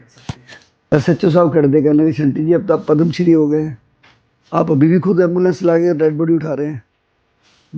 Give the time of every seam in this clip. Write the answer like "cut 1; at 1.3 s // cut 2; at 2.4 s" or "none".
cut 1; at 0.9 s